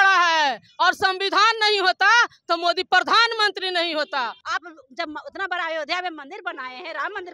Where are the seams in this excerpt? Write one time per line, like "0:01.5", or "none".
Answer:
0:04.4